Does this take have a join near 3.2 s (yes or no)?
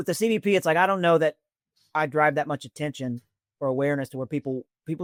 no